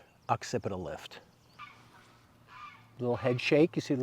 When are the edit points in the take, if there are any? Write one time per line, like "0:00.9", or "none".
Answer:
0:01.6
0:02.9